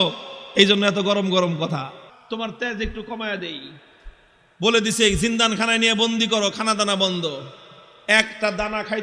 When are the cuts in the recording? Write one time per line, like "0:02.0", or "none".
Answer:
0:02.1